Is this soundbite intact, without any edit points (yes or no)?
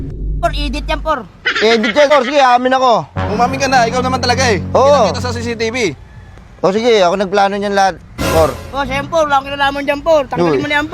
no